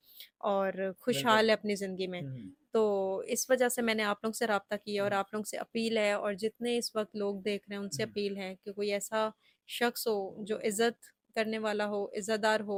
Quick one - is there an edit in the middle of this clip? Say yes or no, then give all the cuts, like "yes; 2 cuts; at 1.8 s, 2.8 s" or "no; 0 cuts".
no; 0 cuts